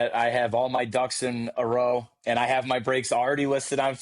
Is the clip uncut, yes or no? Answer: yes